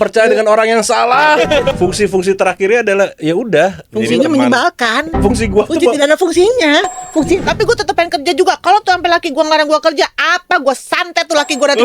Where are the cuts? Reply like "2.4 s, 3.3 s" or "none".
1.7 s, 7.4 s